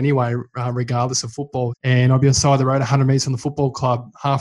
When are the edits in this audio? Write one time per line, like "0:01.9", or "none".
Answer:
0:01.8